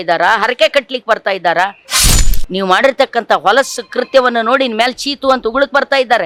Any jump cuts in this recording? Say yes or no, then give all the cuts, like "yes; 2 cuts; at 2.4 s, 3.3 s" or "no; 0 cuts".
no; 0 cuts